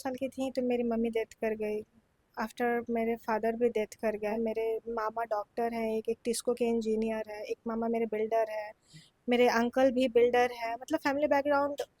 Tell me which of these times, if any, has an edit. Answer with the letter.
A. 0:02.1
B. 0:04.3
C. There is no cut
B